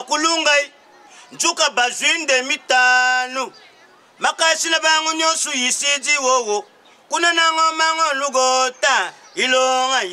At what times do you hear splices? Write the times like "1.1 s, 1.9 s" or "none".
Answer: none